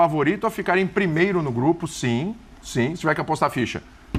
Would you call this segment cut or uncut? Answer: uncut